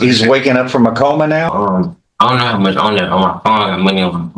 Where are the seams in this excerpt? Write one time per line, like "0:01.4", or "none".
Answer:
0:01.5